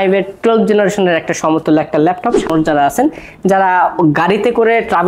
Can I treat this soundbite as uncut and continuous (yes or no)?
no